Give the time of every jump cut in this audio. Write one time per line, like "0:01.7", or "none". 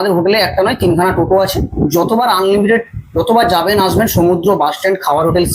none